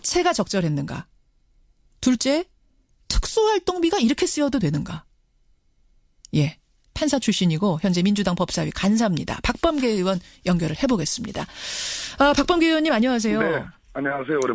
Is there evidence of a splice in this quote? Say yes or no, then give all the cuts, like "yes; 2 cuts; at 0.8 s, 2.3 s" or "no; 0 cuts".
yes; 1 cut; at 5.8 s